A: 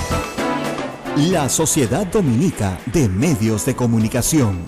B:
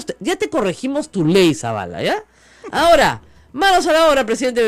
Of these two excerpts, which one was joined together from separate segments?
A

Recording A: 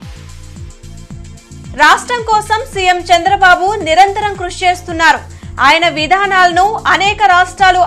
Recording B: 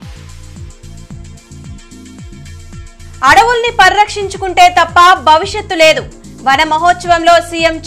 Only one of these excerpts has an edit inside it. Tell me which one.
B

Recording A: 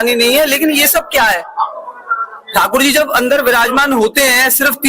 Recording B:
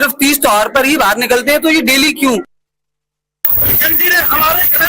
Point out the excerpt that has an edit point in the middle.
A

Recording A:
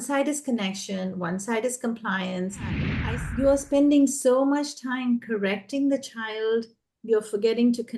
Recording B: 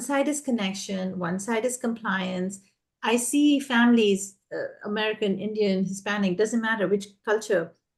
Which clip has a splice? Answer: A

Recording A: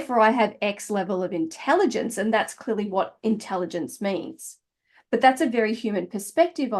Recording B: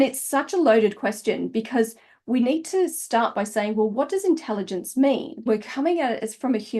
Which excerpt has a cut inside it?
B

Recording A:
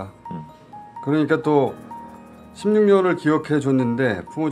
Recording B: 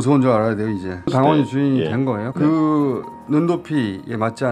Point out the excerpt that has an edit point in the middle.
B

